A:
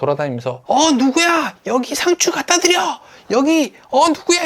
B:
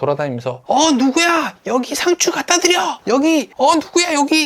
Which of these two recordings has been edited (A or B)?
B